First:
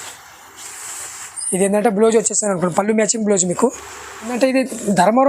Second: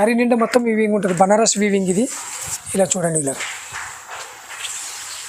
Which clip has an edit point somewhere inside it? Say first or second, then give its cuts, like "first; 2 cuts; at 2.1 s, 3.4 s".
first; 1 cut; at 4.3 s